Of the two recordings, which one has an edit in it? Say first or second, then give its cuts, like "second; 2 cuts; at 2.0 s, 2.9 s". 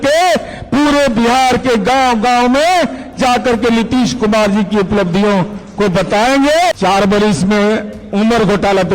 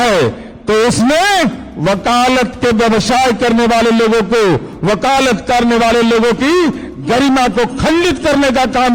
first; 1 cut; at 6.7 s